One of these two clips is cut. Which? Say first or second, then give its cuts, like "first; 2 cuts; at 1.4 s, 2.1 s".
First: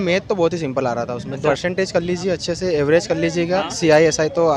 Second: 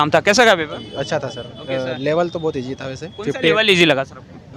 first; 1 cut; at 1.5 s